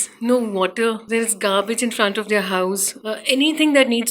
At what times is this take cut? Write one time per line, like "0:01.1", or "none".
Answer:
0:01.0
0:02.9